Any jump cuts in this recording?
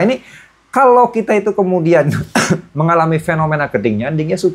no; 0 cuts

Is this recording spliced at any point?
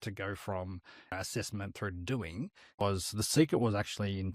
yes; 2 cuts; at 1.1 s, 2.8 s

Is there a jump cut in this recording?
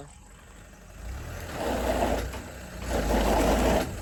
no; 0 cuts

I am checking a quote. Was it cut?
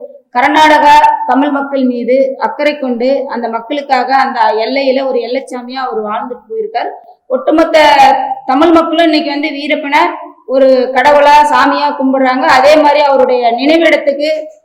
no; 0 cuts

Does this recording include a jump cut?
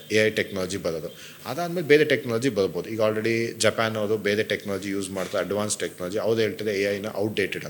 no; 0 cuts

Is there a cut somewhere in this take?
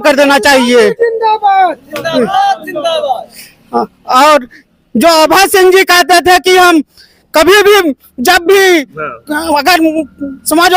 no; 0 cuts

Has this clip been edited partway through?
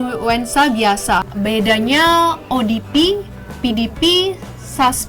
yes; 1 cut; at 1.2 s

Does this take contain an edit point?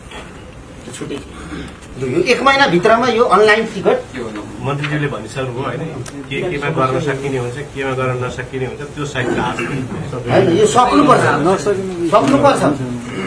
yes; 1 cut; at 1.9 s

